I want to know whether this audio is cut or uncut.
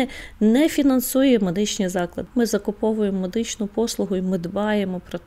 cut